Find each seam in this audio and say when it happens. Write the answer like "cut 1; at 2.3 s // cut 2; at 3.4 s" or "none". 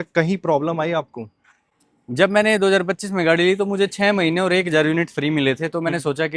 none